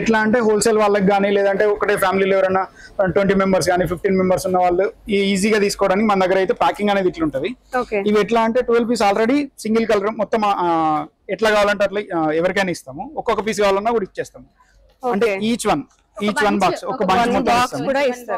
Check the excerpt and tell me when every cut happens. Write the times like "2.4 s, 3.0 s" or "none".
none